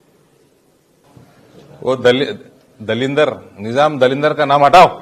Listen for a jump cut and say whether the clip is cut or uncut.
cut